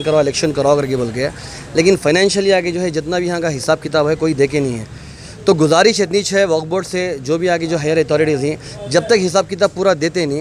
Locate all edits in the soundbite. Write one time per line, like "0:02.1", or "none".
none